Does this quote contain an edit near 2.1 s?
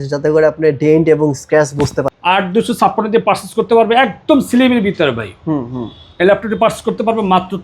yes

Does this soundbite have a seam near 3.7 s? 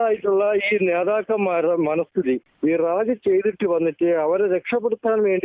no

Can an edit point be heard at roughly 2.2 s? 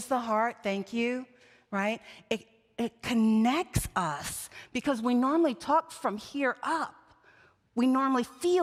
no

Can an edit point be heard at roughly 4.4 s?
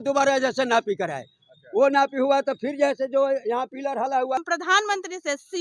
yes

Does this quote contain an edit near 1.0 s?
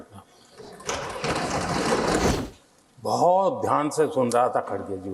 no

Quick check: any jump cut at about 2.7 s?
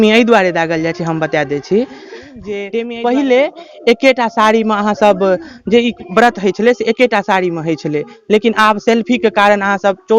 yes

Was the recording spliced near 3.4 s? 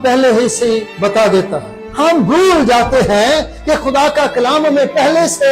no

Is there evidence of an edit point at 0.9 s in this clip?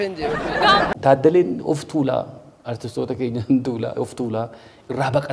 yes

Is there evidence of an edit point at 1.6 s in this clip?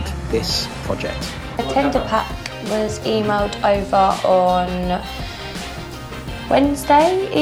yes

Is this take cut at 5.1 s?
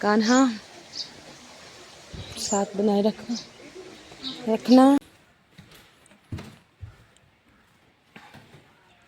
yes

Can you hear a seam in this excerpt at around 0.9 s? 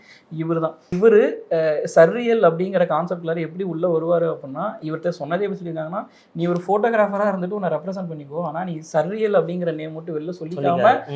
yes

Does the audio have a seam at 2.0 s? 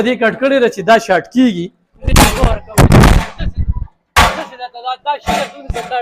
yes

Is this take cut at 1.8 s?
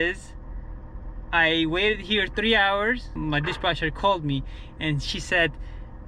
no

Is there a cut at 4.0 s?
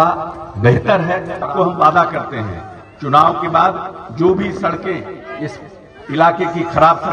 no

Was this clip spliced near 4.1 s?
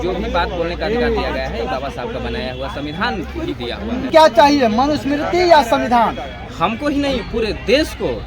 yes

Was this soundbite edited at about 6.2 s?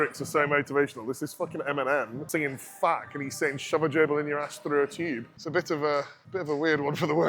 yes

